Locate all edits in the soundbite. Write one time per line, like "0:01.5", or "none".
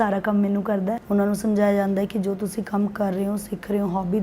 0:01.0